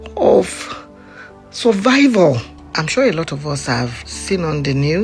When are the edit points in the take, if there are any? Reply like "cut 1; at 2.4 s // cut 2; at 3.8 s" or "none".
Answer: cut 1; at 2.6 s // cut 2; at 4.0 s